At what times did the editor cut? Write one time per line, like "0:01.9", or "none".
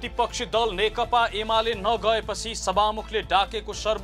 none